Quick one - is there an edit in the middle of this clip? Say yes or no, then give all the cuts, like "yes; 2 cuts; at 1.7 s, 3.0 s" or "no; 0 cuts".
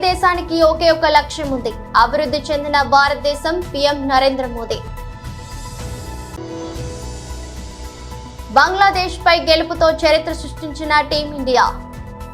yes; 3 cuts; at 4.9 s, 6.3 s, 8.2 s